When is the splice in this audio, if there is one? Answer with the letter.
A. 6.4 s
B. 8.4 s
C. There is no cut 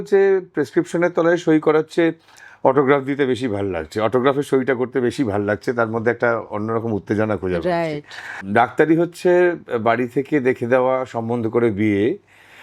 B